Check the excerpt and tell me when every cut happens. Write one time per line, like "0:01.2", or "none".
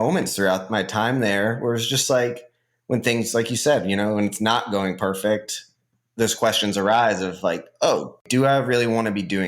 0:08.2